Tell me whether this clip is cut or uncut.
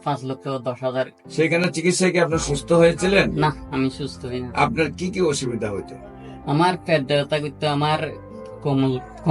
cut